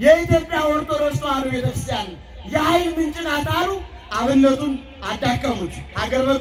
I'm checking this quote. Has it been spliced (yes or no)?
no